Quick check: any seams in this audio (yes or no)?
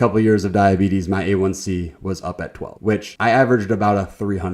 yes